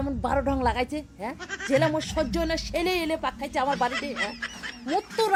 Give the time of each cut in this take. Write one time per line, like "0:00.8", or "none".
none